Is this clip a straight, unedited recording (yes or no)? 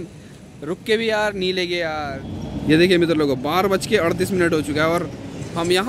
no